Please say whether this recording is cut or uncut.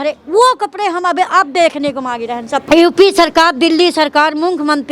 cut